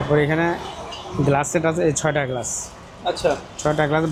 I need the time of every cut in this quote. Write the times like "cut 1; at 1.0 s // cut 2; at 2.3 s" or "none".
none